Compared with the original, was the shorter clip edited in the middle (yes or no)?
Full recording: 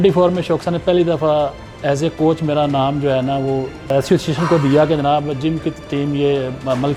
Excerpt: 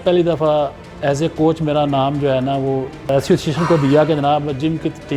no